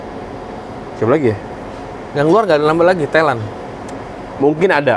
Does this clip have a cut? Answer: no; 0 cuts

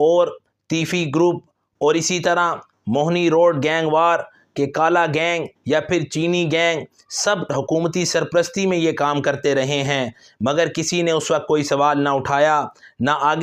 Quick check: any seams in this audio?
no; 0 cuts

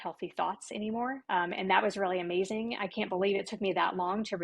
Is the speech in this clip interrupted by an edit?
yes; 1 cut; at 1.2 s

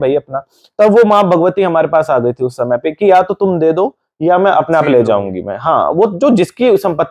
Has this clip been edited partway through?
no; 0 cuts

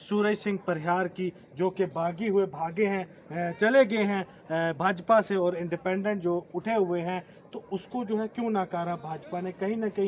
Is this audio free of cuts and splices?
yes; 0 cuts

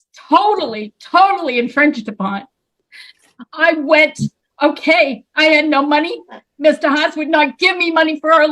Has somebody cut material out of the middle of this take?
no; 0 cuts

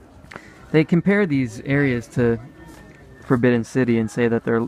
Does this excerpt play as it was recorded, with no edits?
yes; 0 cuts

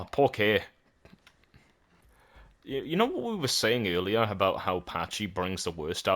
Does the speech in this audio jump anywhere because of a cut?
yes; 1 cut; at 2.1 s

